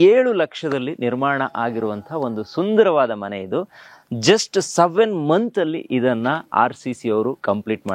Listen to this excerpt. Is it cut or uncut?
uncut